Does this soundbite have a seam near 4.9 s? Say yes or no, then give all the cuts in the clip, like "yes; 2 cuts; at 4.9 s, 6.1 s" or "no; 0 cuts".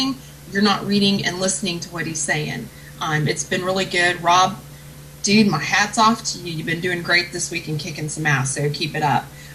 no; 0 cuts